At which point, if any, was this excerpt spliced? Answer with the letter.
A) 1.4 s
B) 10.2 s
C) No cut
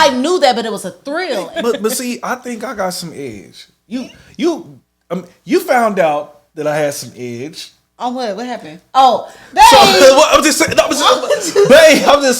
A